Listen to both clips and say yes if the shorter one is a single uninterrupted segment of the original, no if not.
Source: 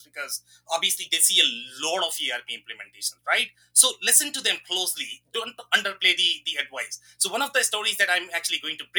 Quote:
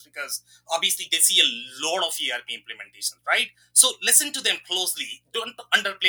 yes